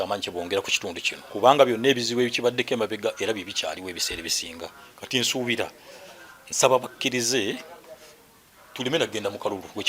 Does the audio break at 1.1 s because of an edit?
yes; 1 cut; at 1.1 s

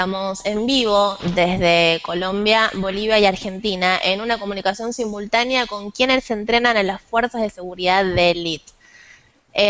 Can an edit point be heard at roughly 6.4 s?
no; 0 cuts

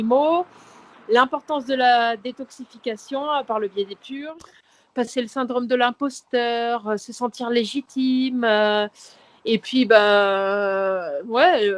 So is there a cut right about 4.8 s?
yes; 1 cut; at 4.8 s

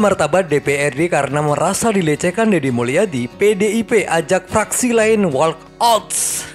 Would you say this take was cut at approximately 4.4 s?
no; 0 cuts

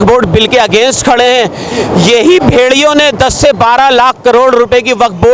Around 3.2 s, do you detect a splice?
no; 0 cuts

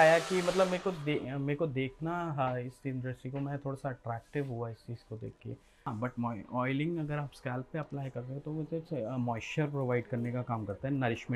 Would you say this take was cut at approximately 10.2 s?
no; 1 cut; at 5.9 s

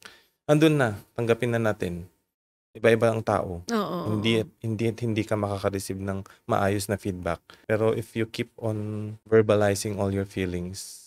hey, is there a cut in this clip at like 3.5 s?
no; 2 cuts; at 7.5 s, 9.1 s

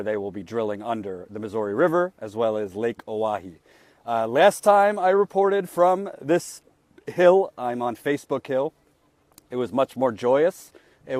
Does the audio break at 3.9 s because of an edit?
no; 0 cuts

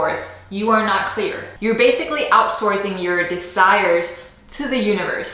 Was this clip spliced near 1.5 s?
yes; 1 cut; at 1.5 s

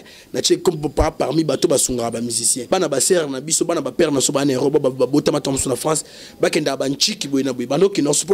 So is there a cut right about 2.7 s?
yes; 1 cut; at 2.7 s

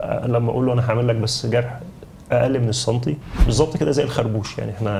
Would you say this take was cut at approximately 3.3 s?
yes; 1 cut; at 3.3 s

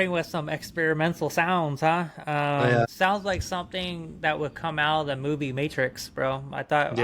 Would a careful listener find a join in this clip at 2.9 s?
yes; 1 cut; at 2.9 s

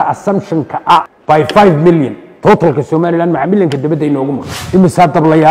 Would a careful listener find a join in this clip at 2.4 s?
no; 2 cuts; at 1.1 s, 4.6 s

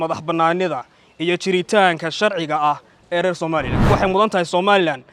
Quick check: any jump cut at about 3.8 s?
yes; 1 cut; at 3.8 s

